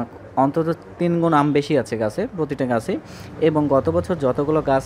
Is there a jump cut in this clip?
no; 0 cuts

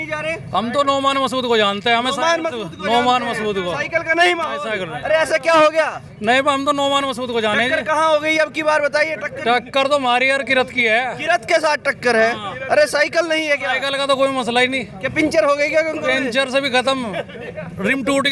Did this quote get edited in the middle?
no; 0 cuts

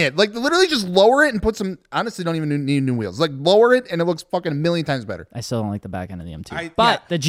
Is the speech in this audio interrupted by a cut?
no; 0 cuts

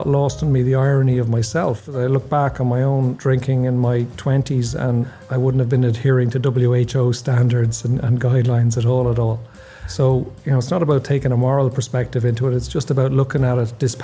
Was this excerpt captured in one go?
no; 3 cuts; at 1.9 s, 3.2 s, 5.2 s

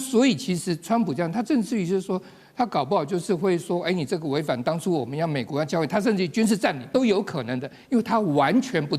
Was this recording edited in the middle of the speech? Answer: yes; 1 cut; at 6.9 s

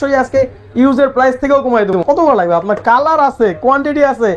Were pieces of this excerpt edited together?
yes; 1 cut; at 2.0 s

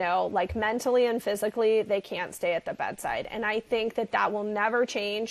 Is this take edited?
no; 0 cuts

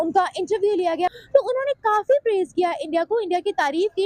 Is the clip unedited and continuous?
no; 1 cut; at 1.1 s

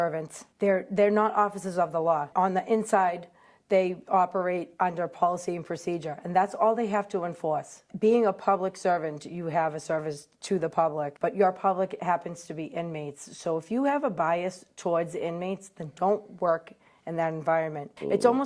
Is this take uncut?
yes; 0 cuts

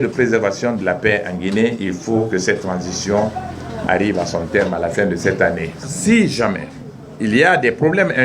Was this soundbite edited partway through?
yes; 1 cut; at 5.8 s

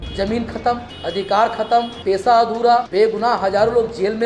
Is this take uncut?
no; 3 cuts; at 0.9 s, 1.9 s, 2.9 s

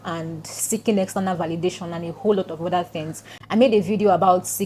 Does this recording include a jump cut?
no; 0 cuts

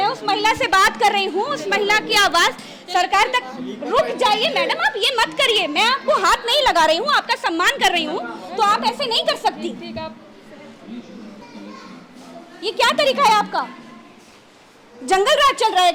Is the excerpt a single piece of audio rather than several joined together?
yes; 0 cuts

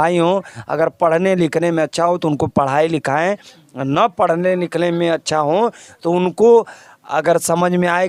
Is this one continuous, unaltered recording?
yes; 0 cuts

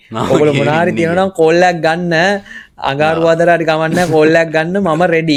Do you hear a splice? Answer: no; 0 cuts

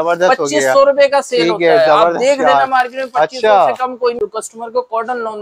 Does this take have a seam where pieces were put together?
yes; 1 cut; at 4.2 s

